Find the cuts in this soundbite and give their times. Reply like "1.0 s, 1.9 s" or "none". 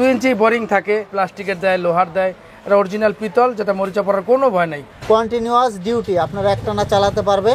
1.1 s, 4.9 s

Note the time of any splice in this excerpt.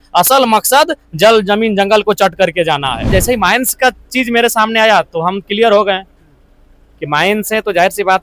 3.0 s

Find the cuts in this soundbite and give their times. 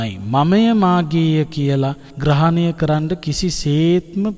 2.1 s

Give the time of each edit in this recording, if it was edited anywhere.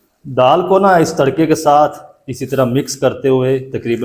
none

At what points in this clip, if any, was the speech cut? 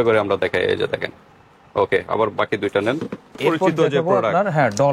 3.4 s

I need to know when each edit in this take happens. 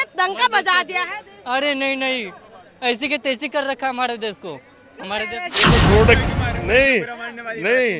5.7 s

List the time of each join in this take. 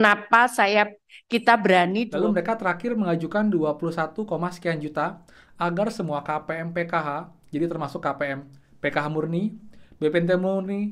2.1 s

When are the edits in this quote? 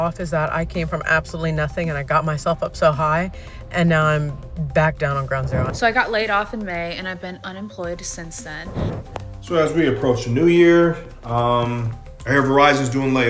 5.7 s, 8.9 s

